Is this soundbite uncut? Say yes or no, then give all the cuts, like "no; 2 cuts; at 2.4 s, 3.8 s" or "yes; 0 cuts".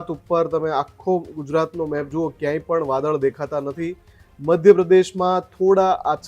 yes; 0 cuts